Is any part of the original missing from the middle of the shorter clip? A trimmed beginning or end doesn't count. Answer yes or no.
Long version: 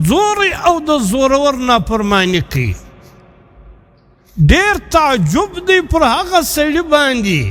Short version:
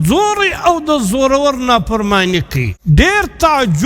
yes